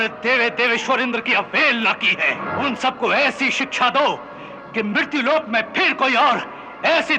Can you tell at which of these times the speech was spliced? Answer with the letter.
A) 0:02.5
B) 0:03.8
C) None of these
A